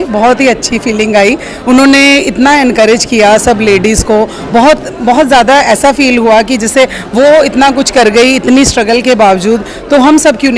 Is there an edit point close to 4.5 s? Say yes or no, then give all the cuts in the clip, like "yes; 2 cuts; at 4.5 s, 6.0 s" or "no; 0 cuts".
no; 0 cuts